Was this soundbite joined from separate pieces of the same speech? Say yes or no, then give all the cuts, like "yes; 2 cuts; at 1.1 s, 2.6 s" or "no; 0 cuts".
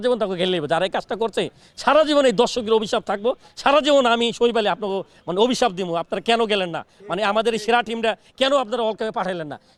no; 0 cuts